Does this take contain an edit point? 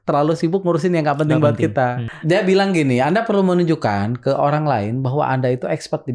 yes; 1 cut; at 2.1 s

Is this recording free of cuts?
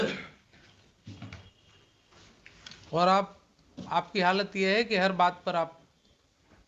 yes; 0 cuts

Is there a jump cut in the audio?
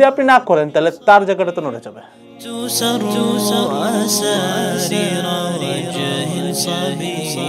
yes; 1 cut; at 2.5 s

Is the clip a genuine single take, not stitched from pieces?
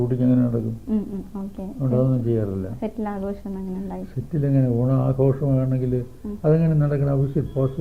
yes; 0 cuts

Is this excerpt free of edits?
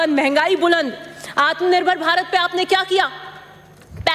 yes; 0 cuts

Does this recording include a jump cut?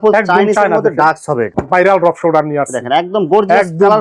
yes; 1 cut; at 1.5 s

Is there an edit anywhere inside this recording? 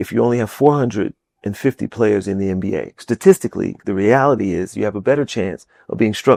no; 0 cuts

